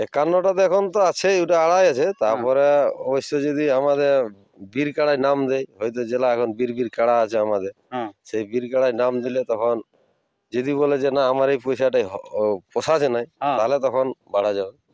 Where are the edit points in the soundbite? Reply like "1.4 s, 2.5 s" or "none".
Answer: none